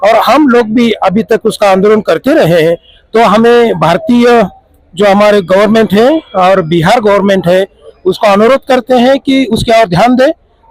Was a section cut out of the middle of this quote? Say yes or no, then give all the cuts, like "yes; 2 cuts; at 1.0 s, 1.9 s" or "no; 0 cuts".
no; 0 cuts